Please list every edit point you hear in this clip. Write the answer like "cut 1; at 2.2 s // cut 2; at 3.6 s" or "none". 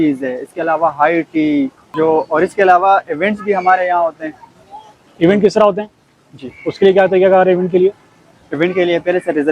none